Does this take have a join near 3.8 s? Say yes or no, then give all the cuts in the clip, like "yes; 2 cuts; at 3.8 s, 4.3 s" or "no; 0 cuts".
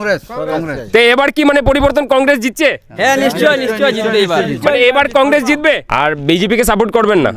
no; 1 cut; at 5.8 s